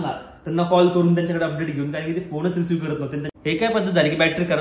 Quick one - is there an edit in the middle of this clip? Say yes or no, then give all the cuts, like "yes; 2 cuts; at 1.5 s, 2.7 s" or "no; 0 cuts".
yes; 1 cut; at 3.3 s